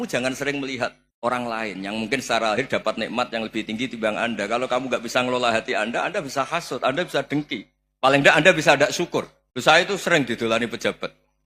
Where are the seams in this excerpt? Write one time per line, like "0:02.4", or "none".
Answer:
0:01.1
0:09.4